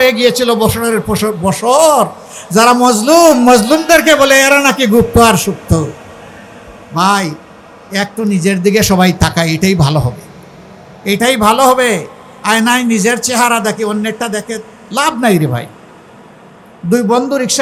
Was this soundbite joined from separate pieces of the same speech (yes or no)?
no